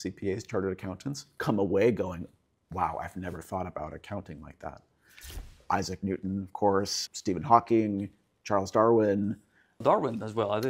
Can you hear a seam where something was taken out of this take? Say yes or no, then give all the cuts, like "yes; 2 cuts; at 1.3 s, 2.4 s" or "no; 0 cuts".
yes; 1 cut; at 5.5 s